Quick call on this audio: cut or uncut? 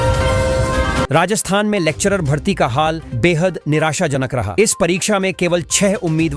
cut